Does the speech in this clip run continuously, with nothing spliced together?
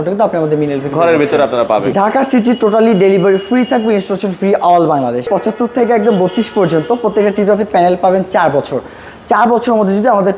no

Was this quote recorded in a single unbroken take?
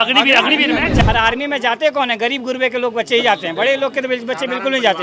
no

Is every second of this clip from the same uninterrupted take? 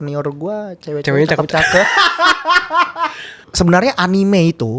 no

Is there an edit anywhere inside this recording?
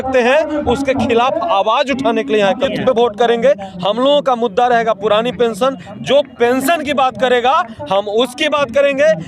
yes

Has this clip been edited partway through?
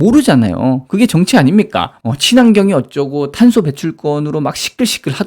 no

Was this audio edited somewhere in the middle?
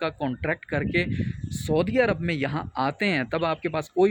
no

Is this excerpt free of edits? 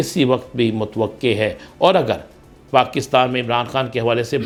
yes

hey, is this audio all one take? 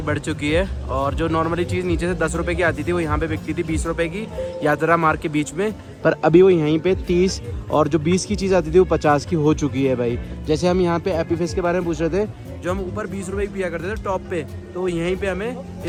yes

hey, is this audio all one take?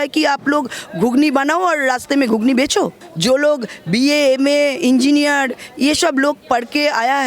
no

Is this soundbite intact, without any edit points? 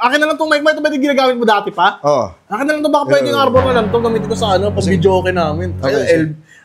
yes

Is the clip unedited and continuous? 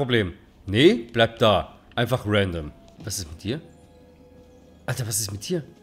no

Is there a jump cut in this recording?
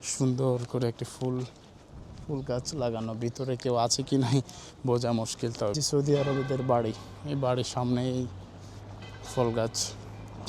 yes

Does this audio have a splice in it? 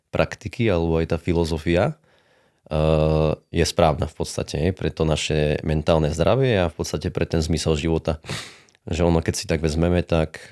no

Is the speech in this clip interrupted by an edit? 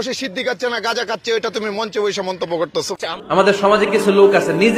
yes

